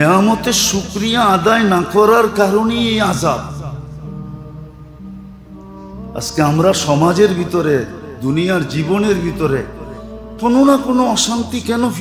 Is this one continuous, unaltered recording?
yes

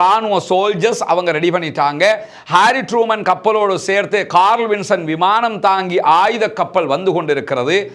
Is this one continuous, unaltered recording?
yes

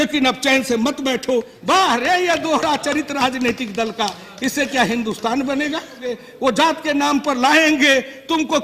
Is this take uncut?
no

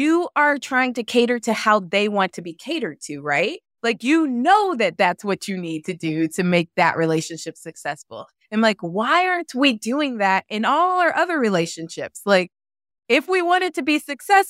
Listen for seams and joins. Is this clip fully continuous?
yes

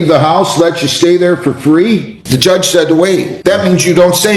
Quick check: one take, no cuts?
no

